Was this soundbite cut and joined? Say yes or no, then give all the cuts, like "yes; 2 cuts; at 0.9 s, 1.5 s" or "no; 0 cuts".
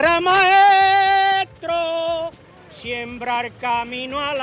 no; 0 cuts